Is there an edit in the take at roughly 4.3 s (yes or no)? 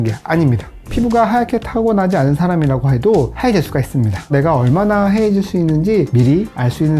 yes